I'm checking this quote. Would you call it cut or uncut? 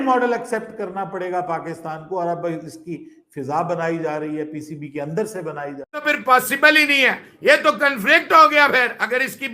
cut